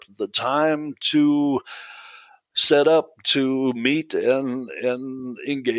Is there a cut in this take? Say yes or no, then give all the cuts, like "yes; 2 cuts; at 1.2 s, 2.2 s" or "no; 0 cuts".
no; 0 cuts